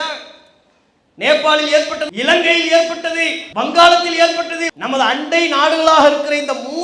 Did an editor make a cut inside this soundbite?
yes; 3 cuts; at 2.1 s, 3.4 s, 4.6 s

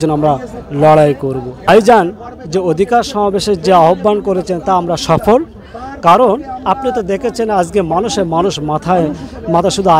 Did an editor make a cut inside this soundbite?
yes; 1 cut; at 1.6 s

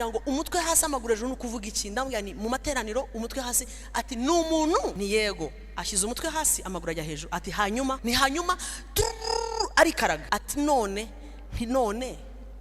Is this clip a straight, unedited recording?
no; 3 cuts; at 4.9 s, 8.0 s, 10.2 s

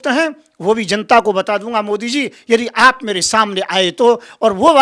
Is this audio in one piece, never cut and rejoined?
yes; 0 cuts

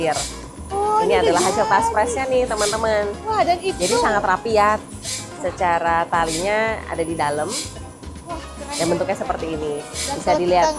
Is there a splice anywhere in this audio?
no; 0 cuts

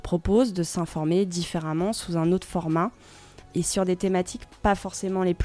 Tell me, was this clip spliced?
yes; 1 cut; at 3.5 s

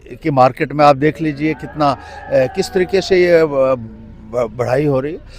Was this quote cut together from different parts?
no; 0 cuts

